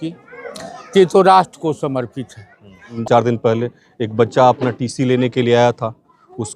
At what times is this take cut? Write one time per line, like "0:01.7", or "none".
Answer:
0:03.0